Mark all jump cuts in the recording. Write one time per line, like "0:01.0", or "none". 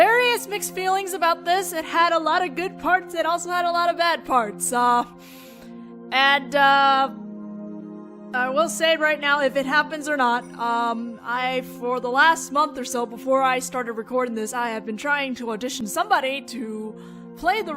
0:12.8